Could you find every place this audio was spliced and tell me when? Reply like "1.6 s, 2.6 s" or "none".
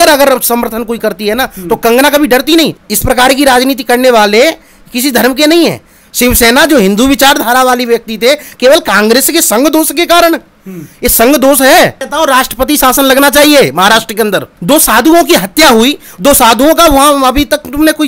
2.8 s, 12.1 s, 14.5 s